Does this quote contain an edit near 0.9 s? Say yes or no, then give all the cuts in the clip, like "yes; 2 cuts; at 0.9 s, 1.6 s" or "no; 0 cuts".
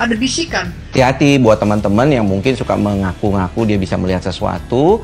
yes; 1 cut; at 0.9 s